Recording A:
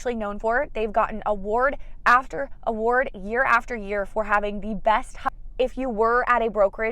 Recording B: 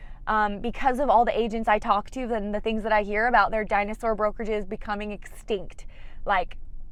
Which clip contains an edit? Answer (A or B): A